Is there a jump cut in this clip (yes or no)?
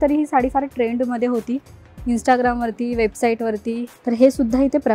yes